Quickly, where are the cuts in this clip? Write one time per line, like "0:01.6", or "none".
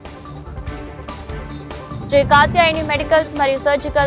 0:01.4